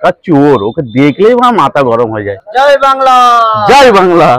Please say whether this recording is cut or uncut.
uncut